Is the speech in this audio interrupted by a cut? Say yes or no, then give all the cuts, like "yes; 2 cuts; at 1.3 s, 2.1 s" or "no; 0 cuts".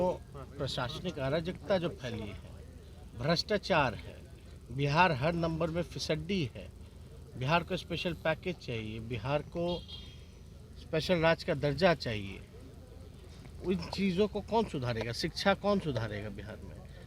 no; 0 cuts